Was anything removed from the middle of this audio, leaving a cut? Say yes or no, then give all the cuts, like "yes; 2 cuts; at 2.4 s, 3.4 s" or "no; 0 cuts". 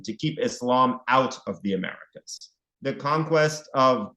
yes; 1 cut; at 2.6 s